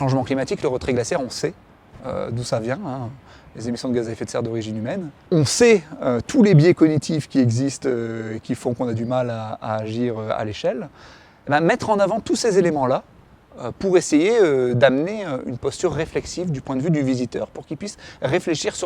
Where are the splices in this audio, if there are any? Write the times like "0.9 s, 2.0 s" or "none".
5.2 s